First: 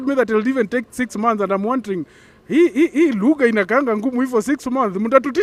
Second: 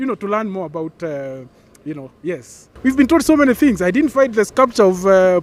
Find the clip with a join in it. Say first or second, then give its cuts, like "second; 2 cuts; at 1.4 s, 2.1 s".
second; 1 cut; at 2.7 s